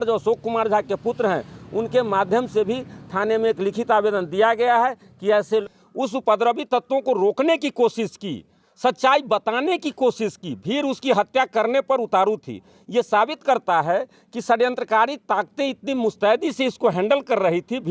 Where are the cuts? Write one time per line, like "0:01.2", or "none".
0:05.7

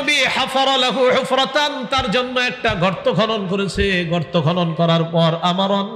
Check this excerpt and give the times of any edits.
none

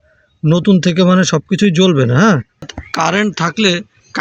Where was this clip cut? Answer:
0:02.7

